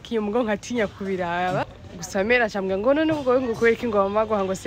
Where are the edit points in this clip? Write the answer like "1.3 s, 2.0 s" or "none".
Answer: 1.7 s